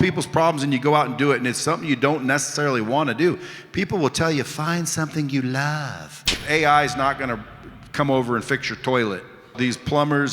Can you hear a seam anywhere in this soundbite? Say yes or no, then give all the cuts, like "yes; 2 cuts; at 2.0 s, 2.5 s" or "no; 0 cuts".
yes; 2 cuts; at 6.4 s, 9.5 s